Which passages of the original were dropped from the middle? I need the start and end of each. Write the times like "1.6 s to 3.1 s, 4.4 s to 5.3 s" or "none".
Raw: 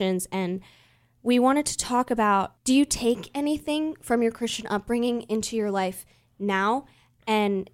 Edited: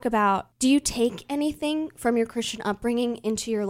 none

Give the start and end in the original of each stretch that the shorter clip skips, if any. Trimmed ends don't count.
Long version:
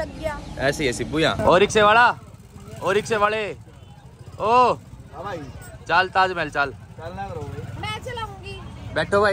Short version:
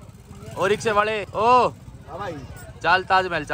3.5 s to 4.3 s

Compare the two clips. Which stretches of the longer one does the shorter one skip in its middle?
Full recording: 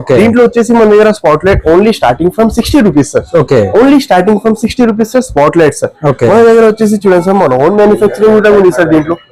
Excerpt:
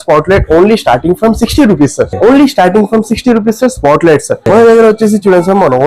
3.3 s to 3.7 s, 5.9 s to 6.2 s

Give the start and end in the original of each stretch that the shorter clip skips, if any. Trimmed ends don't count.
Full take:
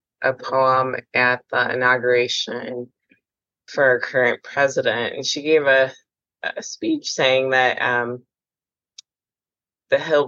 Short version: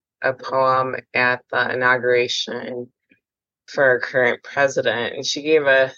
none

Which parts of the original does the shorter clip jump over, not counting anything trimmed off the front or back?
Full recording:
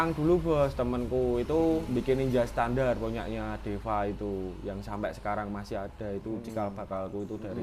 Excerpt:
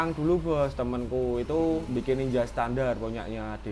none

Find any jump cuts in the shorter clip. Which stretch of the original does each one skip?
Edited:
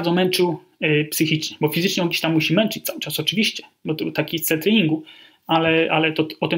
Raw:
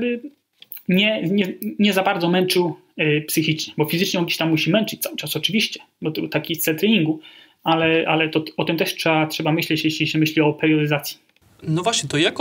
none

